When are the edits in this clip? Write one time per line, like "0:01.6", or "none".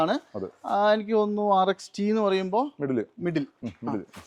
none